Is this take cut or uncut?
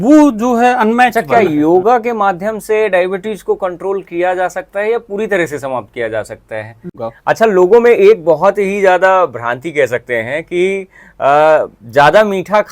cut